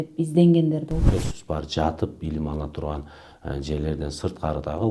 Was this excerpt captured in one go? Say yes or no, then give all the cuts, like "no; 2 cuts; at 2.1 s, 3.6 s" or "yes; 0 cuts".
no; 1 cut; at 1.0 s